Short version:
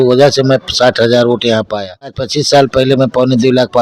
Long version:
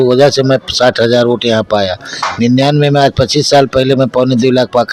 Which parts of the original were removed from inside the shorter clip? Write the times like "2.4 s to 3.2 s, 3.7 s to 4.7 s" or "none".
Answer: 2.2 s to 3.2 s